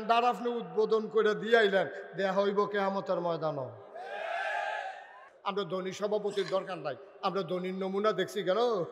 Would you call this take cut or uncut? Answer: cut